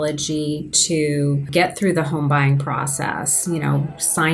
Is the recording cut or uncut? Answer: cut